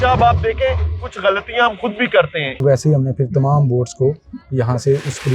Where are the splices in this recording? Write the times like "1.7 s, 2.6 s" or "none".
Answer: 2.6 s